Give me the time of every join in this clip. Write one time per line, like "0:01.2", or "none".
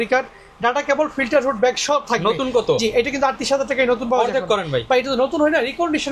none